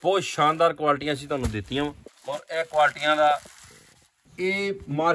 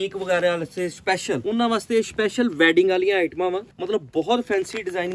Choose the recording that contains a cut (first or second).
first